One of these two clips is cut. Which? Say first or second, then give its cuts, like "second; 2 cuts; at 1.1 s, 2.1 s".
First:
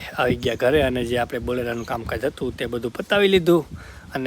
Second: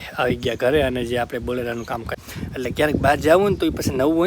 second; 1 cut; at 2.1 s